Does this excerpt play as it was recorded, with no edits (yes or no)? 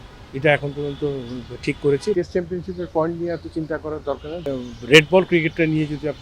no